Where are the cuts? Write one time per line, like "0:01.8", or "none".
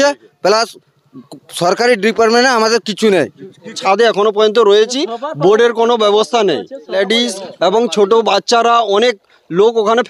0:03.8
0:07.0